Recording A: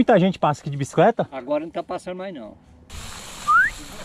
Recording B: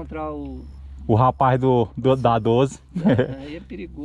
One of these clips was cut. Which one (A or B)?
A